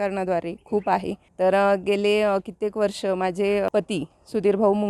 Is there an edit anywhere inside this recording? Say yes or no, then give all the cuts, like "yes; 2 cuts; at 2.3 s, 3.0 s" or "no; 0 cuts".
yes; 2 cuts; at 1.2 s, 3.7 s